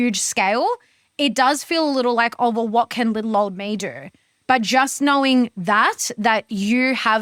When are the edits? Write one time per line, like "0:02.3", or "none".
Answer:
none